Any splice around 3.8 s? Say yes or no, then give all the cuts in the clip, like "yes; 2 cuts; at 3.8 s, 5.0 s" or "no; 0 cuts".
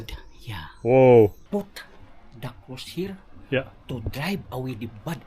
no; 1 cut; at 1.4 s